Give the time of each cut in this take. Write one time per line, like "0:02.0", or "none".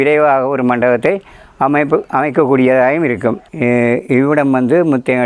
0:03.5